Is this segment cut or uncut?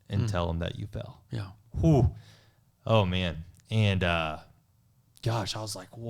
uncut